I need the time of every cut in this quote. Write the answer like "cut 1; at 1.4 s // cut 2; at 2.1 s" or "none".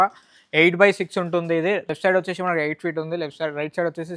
cut 1; at 1.9 s